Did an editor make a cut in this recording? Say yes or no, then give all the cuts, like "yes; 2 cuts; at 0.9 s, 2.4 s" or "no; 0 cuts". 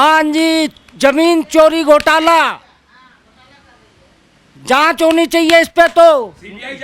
no; 0 cuts